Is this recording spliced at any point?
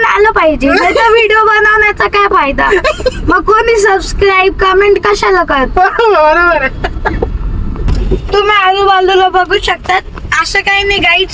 yes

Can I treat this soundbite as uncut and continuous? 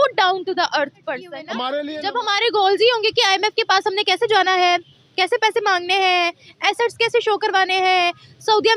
no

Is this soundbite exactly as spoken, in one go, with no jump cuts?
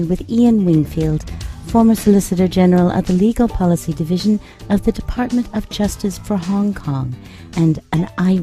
yes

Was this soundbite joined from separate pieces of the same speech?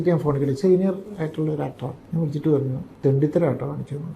yes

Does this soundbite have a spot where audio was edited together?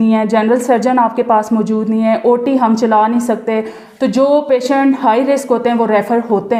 no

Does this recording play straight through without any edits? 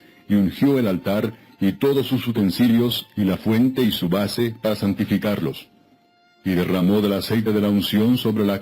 yes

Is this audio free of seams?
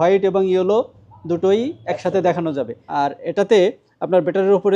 no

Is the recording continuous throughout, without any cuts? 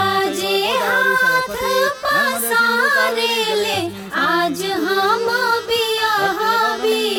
yes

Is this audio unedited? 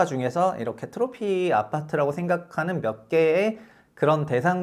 yes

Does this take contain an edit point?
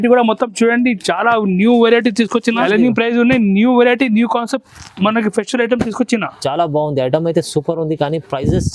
yes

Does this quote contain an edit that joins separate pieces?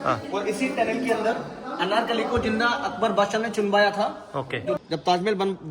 yes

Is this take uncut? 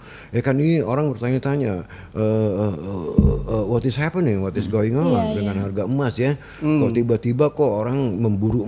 yes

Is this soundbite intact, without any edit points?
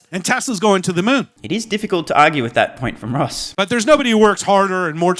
yes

